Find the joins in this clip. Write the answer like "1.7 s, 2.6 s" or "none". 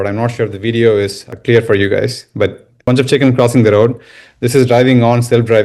1.3 s, 2.7 s